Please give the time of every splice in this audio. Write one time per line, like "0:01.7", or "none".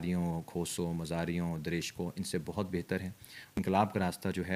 0:03.3